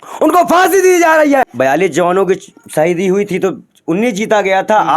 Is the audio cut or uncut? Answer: cut